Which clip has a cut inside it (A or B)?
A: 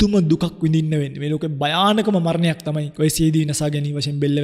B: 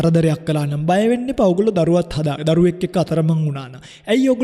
A